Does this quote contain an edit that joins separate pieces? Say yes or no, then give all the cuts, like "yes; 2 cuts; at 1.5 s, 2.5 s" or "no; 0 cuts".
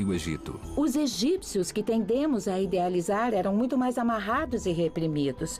yes; 1 cut; at 3.2 s